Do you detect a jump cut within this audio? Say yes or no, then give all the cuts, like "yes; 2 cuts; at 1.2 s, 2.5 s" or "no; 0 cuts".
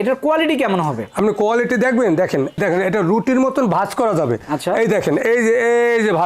yes; 1 cut; at 2.6 s